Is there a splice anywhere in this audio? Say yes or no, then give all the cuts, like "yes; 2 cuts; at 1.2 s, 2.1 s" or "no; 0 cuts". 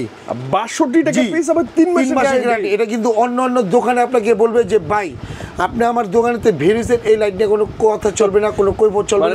no; 0 cuts